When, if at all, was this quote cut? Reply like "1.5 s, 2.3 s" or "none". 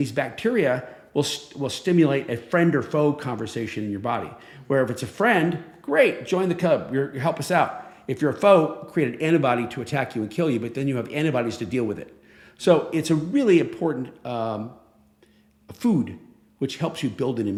none